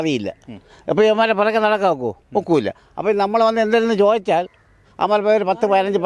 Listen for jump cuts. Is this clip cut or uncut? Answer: uncut